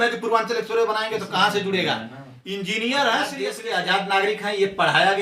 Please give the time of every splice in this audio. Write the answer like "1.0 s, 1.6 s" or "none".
3.6 s